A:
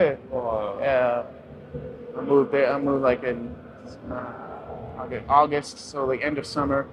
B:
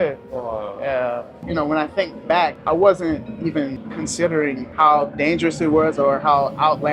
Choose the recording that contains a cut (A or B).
B